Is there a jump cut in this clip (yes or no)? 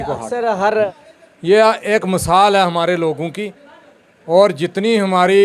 yes